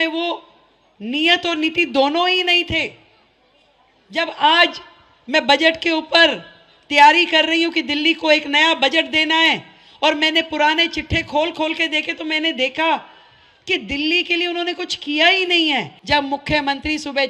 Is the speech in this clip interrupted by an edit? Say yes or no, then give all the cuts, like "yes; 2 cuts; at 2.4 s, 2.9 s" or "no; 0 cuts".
yes; 1 cut; at 15.9 s